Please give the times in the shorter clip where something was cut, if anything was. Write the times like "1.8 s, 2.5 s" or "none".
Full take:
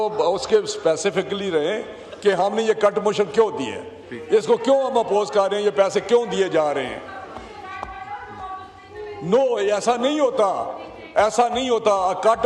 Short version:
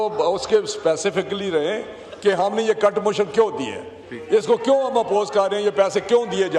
none